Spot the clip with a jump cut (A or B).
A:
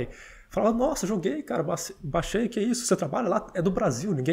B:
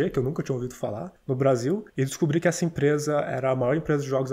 B